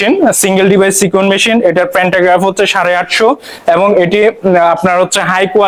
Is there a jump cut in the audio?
no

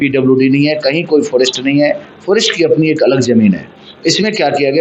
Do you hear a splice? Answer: no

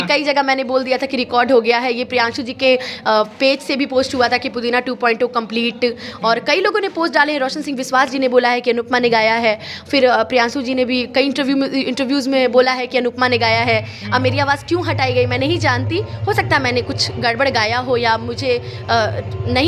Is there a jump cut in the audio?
no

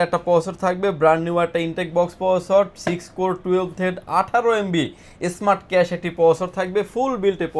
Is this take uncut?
yes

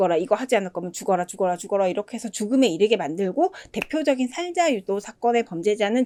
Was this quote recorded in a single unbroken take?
yes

